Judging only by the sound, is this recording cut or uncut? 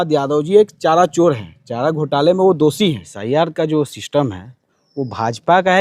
cut